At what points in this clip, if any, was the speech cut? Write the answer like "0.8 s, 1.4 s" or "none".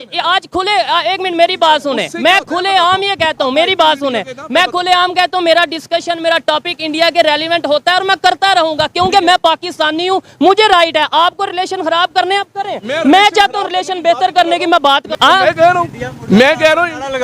15.1 s